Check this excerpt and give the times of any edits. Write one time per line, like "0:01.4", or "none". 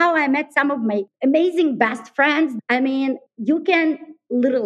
0:01.1
0:02.6
0:03.3